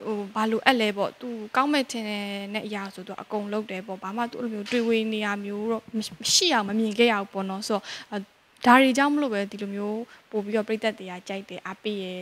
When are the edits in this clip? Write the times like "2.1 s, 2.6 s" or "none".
none